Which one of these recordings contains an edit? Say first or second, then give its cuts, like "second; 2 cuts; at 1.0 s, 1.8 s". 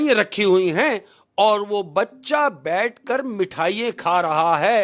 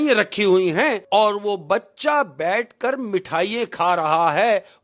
second; 1 cut; at 1.0 s